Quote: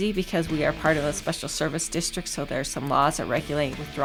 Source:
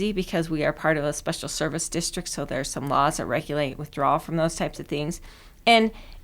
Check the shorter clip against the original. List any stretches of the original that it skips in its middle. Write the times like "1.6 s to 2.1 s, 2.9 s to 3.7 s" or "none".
none